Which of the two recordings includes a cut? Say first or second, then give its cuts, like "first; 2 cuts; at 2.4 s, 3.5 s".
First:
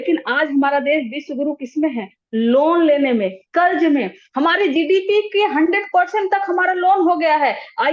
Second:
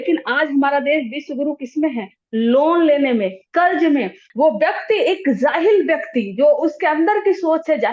second; 1 cut; at 4.2 s